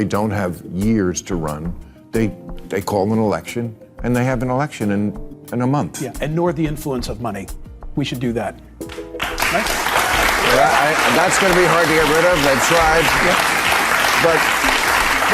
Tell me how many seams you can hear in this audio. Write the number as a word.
one